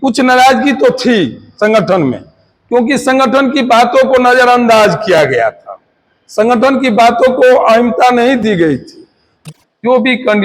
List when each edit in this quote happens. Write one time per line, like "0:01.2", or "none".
0:09.4